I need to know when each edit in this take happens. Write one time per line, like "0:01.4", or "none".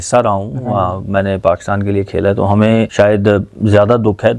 0:02.9